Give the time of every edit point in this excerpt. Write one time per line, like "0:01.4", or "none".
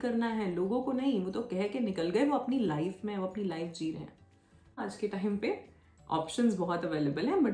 0:04.8